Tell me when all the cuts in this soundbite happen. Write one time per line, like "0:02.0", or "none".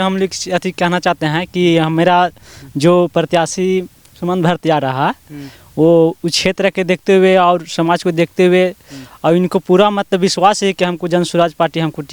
none